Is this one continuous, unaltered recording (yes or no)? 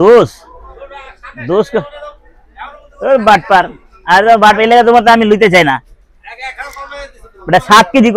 yes